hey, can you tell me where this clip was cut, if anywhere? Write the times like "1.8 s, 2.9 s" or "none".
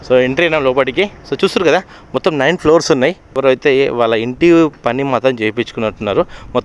3.4 s